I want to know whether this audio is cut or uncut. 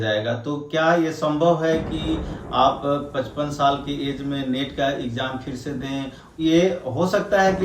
cut